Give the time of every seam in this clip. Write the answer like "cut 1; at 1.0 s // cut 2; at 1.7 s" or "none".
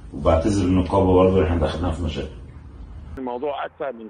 cut 1; at 3.0 s